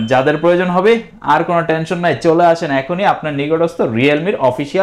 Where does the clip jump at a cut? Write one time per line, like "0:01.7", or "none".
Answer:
none

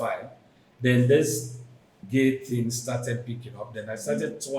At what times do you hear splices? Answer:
0:01.9

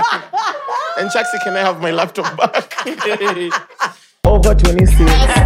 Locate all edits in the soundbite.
0:04.1

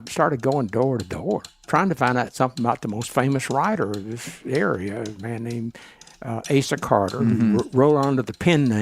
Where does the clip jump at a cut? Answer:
0:01.5

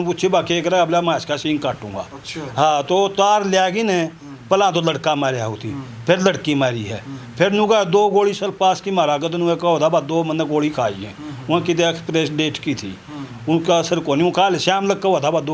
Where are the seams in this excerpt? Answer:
none

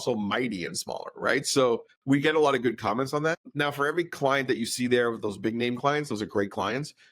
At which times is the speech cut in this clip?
0:01.9
0:03.4

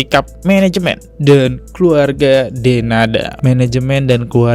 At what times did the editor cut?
0:03.4

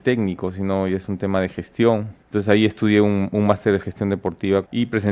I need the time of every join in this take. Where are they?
0:02.2

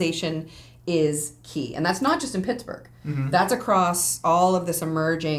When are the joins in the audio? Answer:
none

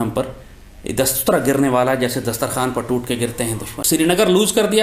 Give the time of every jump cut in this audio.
0:03.7

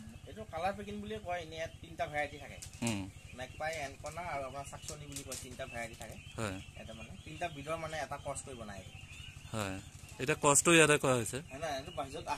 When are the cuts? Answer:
none

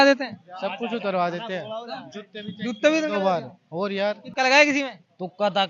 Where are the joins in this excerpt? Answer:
0:04.2

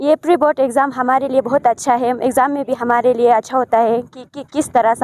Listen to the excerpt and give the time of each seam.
none

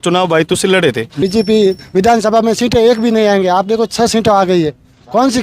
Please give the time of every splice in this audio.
0:01.2

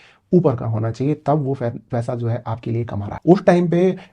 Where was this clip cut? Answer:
0:02.9

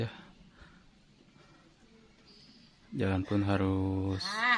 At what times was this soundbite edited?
none

